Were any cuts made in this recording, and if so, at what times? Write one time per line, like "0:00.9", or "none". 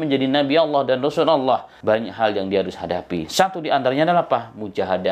0:01.7